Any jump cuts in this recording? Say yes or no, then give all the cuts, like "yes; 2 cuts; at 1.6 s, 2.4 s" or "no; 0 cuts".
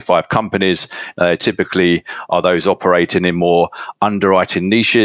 no; 0 cuts